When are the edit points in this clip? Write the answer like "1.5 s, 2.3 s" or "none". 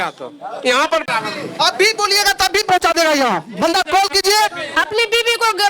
1.1 s, 4.6 s